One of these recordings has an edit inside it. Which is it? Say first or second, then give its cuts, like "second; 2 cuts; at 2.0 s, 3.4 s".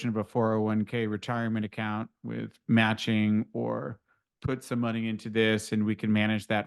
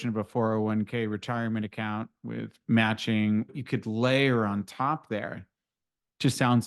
second; 1 cut; at 3.5 s